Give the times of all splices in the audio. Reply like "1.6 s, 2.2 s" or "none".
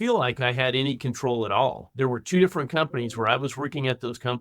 1.8 s